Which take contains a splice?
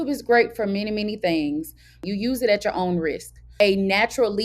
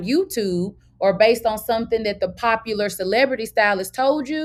first; 2 cuts; at 2.0 s, 3.5 s

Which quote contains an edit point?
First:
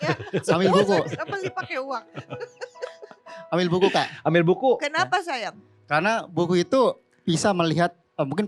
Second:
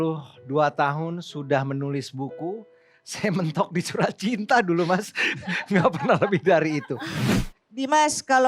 second; 1 cut; at 7.2 s

